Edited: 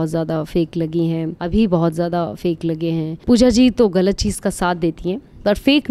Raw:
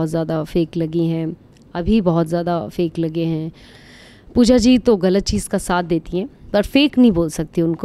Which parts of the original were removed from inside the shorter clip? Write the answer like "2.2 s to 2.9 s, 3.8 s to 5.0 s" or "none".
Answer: 1.4 s to 1.7 s, 3.5 s to 4.2 s